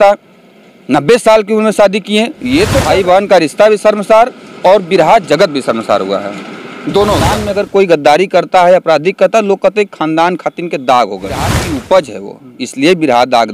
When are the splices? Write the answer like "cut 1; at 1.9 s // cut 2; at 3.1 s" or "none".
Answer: cut 1; at 2.8 s // cut 2; at 7.4 s // cut 3; at 11.6 s